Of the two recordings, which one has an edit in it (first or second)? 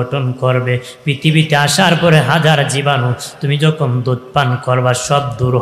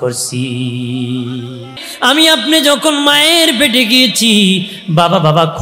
second